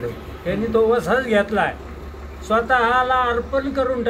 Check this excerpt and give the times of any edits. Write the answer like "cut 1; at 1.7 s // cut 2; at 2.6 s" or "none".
none